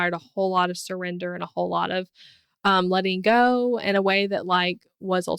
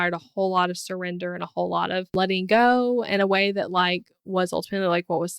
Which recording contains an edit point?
second; 1 cut; at 2.1 s

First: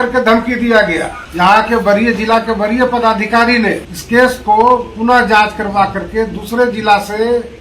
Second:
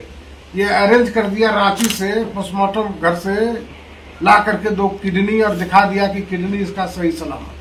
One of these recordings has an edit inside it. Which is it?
first; 2 cuts; at 1.2 s, 3.9 s

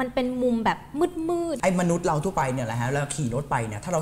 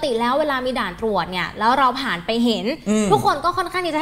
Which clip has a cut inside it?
first; 1 cut; at 1.5 s

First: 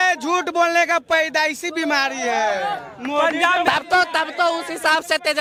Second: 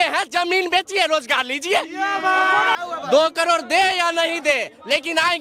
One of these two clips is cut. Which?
second; 1 cut; at 2.8 s

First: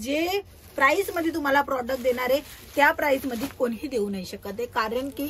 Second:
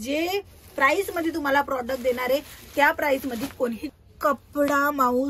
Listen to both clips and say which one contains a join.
second; 1 cut; at 3.8 s

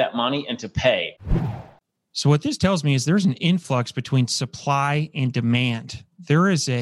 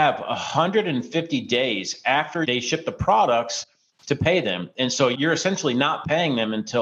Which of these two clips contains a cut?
first; 1 cut; at 1.5 s

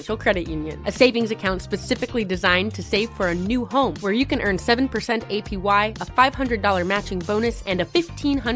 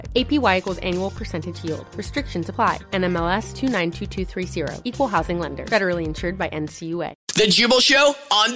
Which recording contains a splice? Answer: second; 1 cut; at 7.2 s

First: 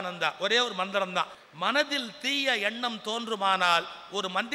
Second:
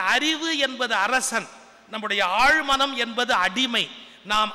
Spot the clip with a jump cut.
first; 1 cut; at 1.4 s

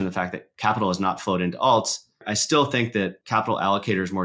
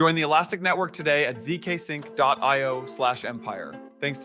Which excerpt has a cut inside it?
first; 2 cuts; at 2.3 s, 3.2 s

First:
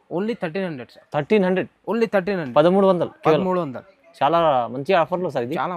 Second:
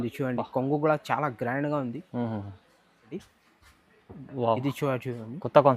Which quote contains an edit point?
second; 1 cut; at 3.2 s

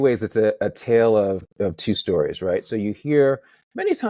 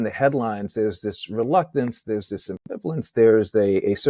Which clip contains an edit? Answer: first; 1 cut; at 1.5 s

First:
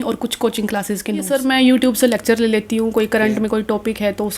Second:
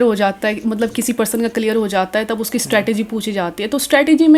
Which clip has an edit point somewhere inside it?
first; 1 cut; at 1.3 s

